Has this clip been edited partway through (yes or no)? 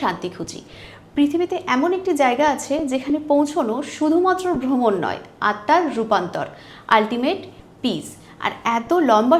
no